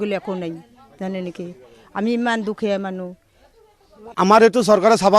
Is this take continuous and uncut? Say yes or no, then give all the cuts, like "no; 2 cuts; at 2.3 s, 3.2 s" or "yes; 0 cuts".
no; 1 cut; at 4.0 s